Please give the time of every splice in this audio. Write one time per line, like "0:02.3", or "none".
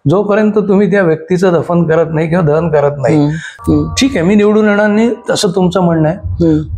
0:03.5